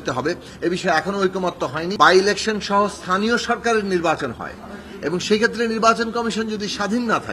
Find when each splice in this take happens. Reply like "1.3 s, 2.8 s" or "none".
1.9 s